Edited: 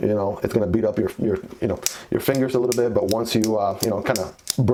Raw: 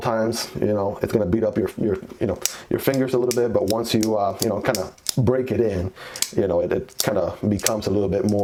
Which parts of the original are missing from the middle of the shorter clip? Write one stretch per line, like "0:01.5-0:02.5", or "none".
none